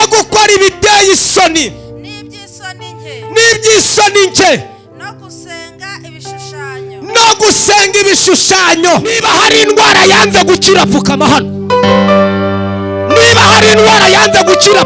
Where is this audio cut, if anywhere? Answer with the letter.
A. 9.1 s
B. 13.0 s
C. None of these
A